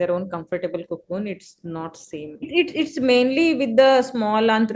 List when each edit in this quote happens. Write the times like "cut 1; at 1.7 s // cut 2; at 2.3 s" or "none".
cut 1; at 2.5 s